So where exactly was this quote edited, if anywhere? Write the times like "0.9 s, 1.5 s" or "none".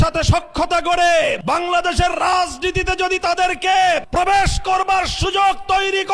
1.4 s, 4.1 s